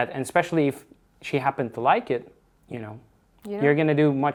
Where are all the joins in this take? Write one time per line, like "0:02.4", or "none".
none